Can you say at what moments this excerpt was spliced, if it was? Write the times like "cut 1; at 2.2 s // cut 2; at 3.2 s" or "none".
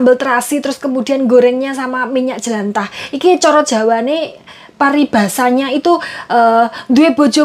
none